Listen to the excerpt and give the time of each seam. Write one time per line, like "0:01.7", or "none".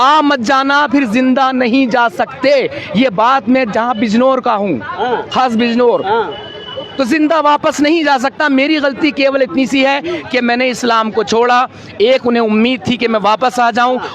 none